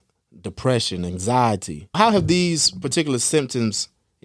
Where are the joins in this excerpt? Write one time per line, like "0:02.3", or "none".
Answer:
0:01.9